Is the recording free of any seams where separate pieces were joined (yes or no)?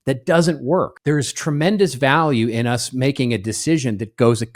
no